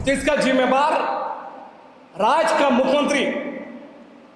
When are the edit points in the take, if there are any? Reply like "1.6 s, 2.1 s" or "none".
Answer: none